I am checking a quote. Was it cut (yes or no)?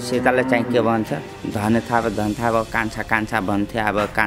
no